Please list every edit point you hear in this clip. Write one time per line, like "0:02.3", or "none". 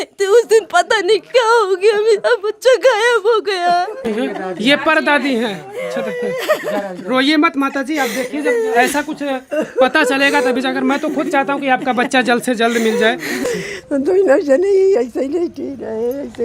0:04.1
0:13.5